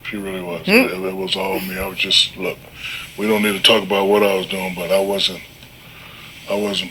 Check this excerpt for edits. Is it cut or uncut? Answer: uncut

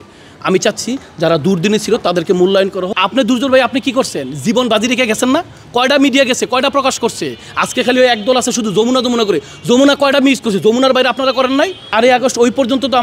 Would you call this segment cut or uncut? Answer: cut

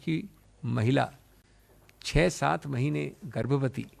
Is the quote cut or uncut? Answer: uncut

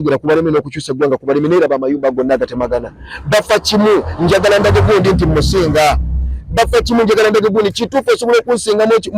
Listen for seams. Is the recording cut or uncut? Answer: uncut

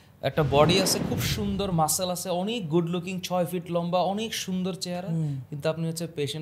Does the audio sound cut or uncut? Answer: uncut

